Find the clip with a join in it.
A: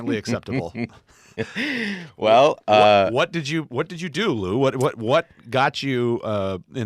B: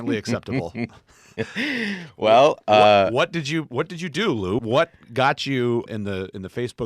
B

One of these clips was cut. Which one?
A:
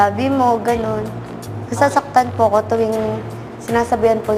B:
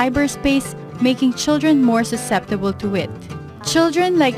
B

